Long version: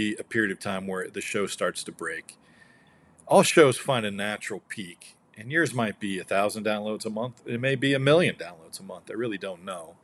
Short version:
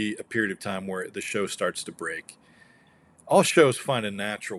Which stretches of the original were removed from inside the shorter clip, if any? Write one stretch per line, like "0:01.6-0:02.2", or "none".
none